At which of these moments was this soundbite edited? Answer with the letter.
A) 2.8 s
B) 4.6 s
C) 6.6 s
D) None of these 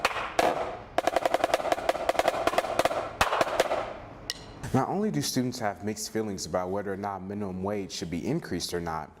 B